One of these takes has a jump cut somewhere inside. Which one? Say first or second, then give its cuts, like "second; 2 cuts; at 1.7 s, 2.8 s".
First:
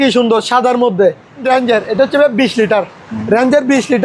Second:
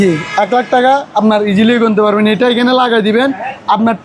first; 1 cut; at 1.4 s